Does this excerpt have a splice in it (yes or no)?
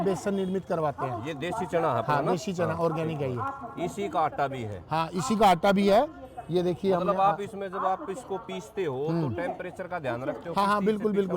no